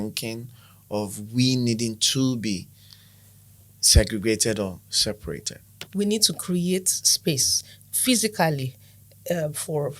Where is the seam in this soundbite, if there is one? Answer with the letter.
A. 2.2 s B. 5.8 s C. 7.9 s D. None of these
B